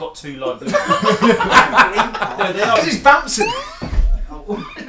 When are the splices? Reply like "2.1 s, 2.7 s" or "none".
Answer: 2.7 s

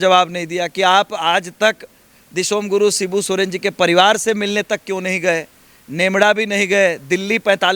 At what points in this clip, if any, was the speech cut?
none

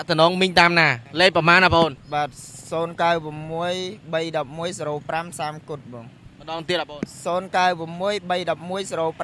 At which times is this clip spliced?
none

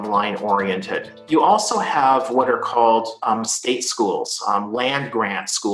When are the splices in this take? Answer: 1.1 s

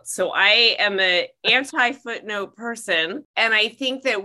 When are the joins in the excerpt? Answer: 3.3 s

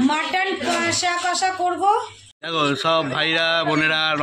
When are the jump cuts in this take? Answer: 2.6 s

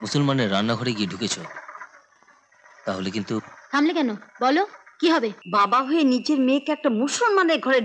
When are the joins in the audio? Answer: 5.4 s

